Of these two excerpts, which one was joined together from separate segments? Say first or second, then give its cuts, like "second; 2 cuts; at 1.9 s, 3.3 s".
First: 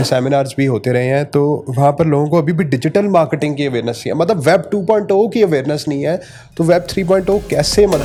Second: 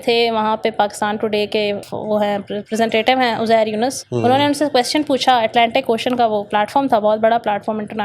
second; 2 cuts; at 1.8 s, 4.0 s